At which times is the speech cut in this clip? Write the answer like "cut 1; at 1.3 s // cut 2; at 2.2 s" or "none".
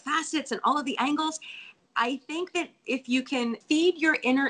cut 1; at 1.7 s // cut 2; at 3.6 s